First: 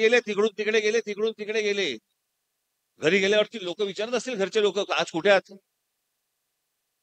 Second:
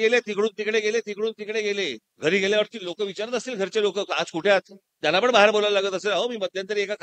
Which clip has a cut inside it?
second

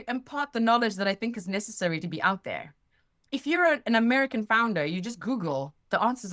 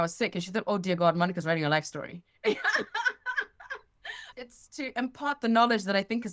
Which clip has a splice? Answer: first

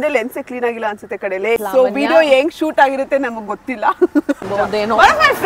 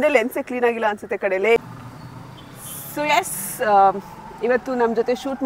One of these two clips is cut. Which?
first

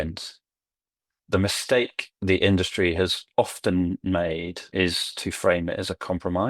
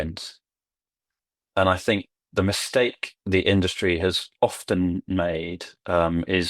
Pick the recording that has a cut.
first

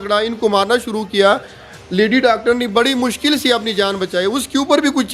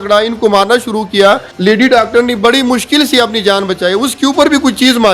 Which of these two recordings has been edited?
second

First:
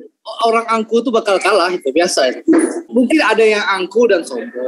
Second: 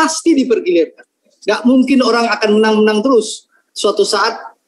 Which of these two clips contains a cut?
first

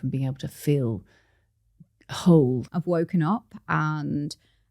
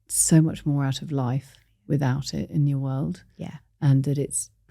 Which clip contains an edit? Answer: first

